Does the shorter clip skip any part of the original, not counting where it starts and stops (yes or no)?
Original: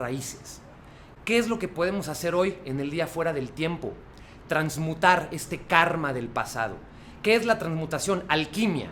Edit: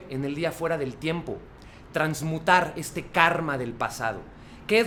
no